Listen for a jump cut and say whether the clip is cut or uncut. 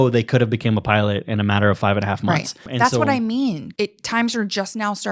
cut